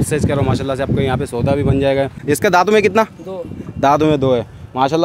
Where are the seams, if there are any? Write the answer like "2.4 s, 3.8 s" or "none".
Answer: 2.2 s

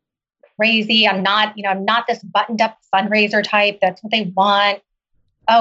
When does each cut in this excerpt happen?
none

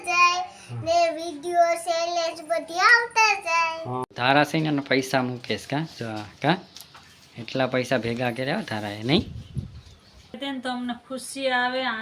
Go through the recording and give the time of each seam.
4.0 s, 10.4 s

